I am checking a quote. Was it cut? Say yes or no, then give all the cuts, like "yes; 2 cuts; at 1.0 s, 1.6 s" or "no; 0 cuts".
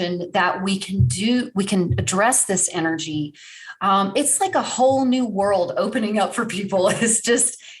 no; 0 cuts